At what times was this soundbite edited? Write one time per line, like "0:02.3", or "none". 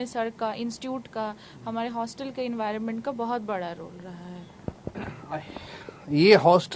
none